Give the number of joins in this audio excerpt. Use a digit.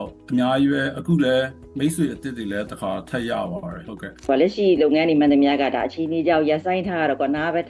1